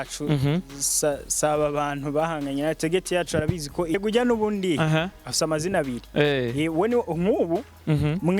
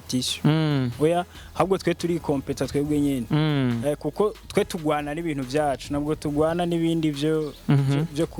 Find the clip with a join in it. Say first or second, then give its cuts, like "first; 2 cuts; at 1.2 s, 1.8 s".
first; 1 cut; at 3.9 s